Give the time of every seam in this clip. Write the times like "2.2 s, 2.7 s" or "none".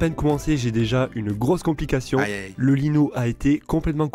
none